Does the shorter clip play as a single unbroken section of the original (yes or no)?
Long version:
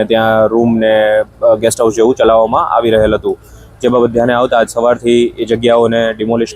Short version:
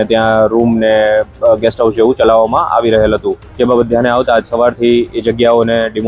no